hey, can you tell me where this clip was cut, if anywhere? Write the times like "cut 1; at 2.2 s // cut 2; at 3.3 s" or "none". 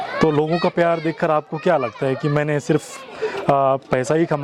none